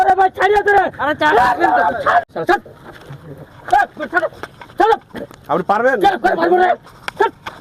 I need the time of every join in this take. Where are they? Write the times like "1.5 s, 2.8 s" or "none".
2.2 s